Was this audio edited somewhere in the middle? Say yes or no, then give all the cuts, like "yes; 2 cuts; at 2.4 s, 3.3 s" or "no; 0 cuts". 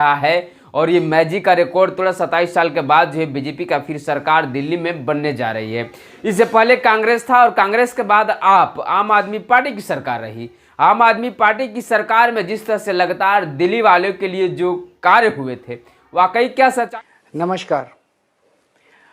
yes; 1 cut; at 16.9 s